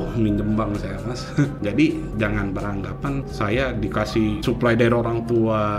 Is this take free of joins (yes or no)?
no